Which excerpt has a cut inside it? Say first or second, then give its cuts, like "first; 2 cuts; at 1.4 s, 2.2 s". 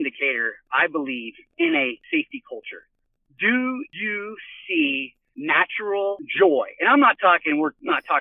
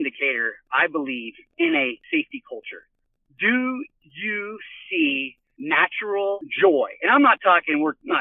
first; 1 cut; at 4.0 s